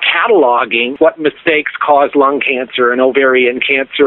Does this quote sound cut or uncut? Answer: cut